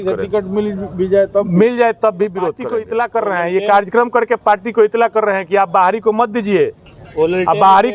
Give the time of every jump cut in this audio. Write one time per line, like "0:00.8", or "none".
0:02.7